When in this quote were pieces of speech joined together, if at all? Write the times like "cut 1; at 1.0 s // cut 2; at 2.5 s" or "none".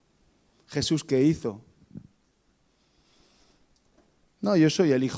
none